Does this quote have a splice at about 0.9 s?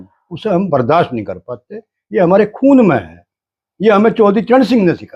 no; 0 cuts

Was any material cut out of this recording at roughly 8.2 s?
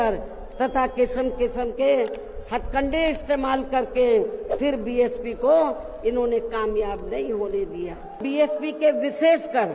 yes; 1 cut; at 8.2 s

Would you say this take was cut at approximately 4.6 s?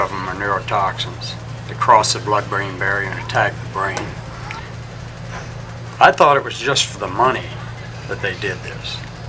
yes; 1 cut; at 4.6 s

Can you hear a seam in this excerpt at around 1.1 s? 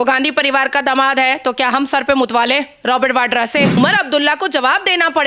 no; 1 cut; at 3.8 s

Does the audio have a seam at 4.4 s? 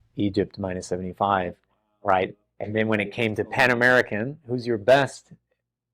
no; 0 cuts

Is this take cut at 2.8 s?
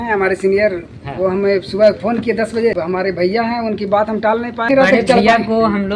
yes; 2 cuts; at 2.8 s, 4.7 s

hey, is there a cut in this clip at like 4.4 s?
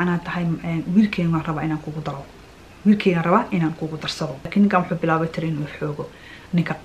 yes; 1 cut; at 4.4 s

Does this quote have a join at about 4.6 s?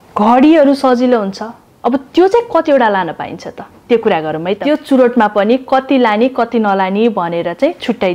yes; 1 cut; at 4.6 s

